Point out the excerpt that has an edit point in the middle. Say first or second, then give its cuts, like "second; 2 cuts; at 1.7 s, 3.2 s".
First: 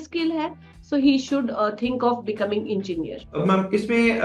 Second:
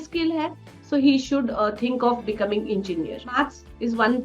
second; 1 cut; at 3.2 s